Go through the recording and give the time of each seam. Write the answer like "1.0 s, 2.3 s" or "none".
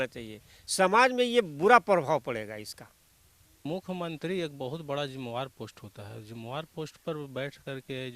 3.6 s